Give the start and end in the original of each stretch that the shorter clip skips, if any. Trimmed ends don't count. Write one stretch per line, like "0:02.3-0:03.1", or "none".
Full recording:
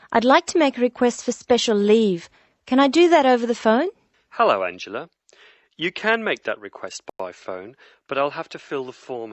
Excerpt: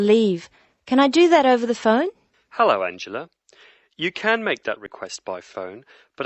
0:06.9-0:07.0